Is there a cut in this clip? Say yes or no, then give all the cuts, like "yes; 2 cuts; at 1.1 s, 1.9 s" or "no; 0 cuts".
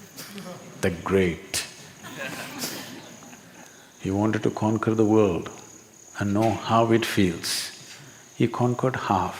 no; 0 cuts